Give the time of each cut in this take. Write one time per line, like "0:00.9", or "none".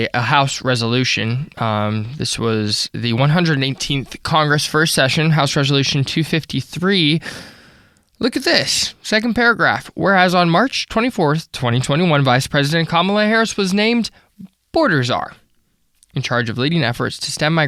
none

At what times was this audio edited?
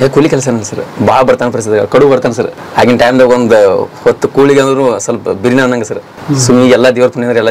0:02.6
0:06.1

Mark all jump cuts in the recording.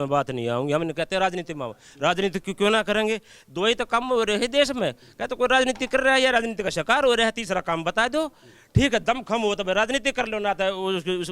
none

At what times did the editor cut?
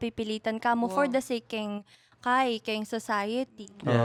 none

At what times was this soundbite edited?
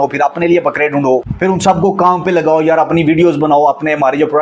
0:01.3

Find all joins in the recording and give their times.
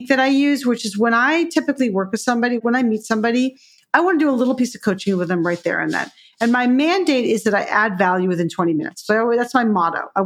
0:02.6

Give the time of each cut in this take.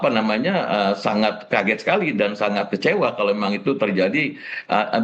none

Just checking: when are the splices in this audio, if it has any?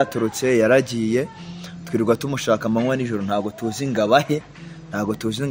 none

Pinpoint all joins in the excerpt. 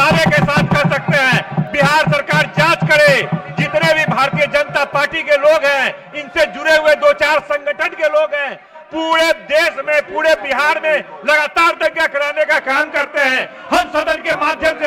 none

